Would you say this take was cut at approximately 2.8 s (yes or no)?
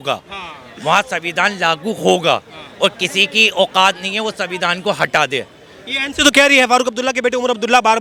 no